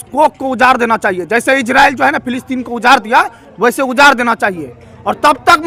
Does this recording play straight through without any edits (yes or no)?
yes